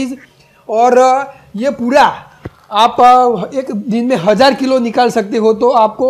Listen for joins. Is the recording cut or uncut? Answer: uncut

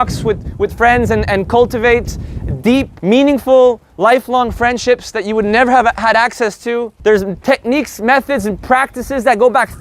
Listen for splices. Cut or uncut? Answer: cut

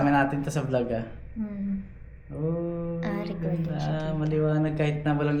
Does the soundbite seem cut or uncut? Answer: uncut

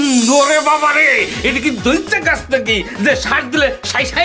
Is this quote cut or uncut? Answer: uncut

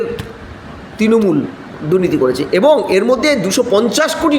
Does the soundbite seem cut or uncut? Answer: cut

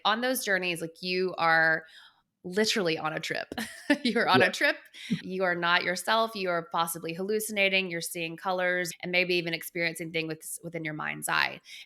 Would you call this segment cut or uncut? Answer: uncut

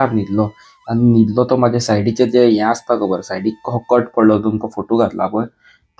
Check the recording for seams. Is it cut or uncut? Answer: uncut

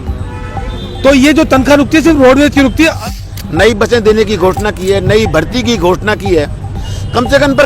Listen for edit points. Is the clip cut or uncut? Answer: cut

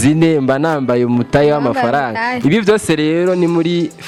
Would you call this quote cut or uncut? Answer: uncut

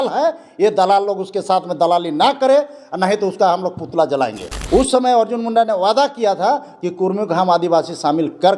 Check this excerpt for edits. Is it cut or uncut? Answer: cut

